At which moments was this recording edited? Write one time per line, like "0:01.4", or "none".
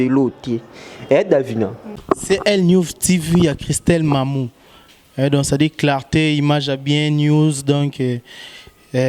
0:01.9